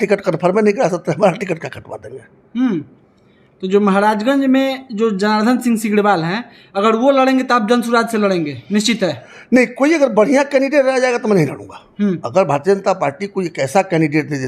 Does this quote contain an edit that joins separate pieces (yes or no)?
no